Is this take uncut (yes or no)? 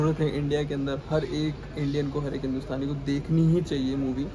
yes